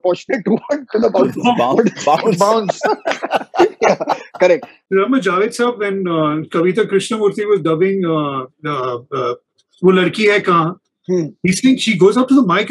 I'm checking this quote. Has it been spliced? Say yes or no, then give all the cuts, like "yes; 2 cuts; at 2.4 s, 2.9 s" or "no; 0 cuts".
yes; 1 cut; at 4.7 s